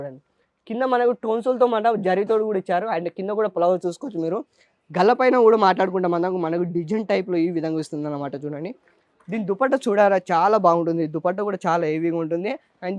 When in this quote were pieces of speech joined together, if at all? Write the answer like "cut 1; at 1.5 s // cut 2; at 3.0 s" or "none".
none